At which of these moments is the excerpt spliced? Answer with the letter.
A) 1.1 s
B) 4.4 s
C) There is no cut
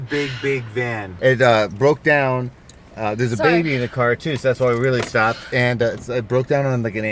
A